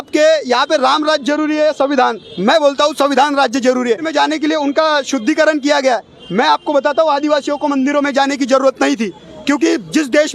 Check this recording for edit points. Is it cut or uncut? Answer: cut